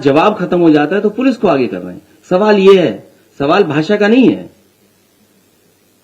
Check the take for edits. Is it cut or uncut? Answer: uncut